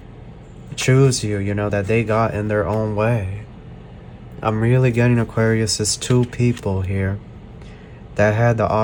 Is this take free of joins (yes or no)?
yes